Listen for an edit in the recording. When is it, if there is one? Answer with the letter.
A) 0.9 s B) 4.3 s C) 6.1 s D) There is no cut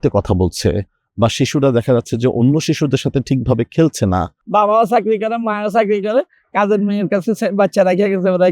B